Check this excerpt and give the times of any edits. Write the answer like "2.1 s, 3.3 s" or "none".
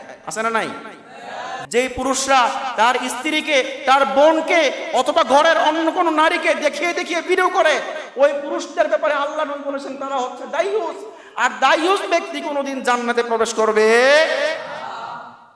1.6 s

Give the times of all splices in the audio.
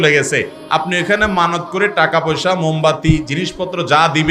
none

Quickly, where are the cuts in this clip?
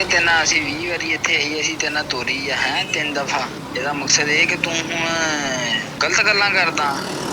3.6 s, 5.9 s

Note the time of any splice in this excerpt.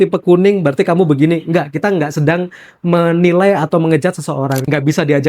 4.2 s

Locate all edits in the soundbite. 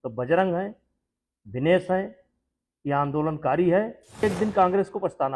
4.2 s

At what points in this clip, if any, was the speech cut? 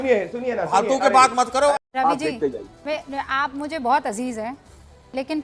1.7 s

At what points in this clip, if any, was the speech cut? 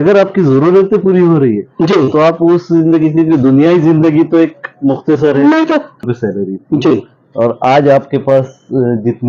6.0 s

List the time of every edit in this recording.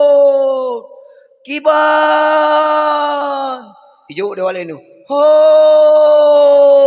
none

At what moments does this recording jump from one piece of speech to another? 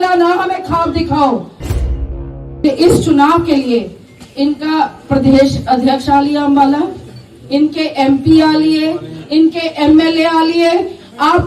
2.1 s

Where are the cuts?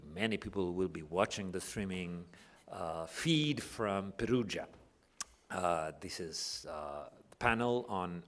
6.4 s

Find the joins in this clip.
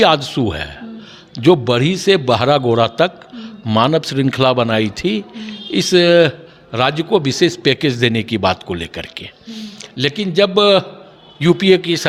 none

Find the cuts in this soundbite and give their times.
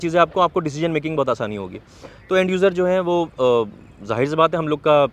none

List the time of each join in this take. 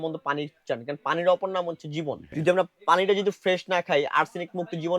2.3 s

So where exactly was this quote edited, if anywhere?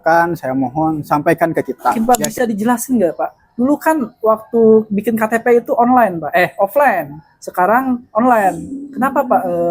2.0 s

